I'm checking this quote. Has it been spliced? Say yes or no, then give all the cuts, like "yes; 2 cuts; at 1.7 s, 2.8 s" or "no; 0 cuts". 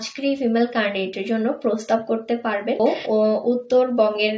yes; 1 cut; at 3.0 s